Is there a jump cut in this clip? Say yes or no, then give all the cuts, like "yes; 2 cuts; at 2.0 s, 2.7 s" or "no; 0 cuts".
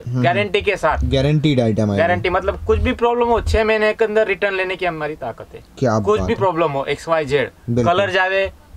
no; 0 cuts